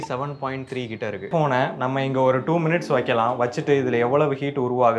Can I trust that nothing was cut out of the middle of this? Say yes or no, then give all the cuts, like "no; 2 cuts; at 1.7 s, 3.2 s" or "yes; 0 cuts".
no; 1 cut; at 1.3 s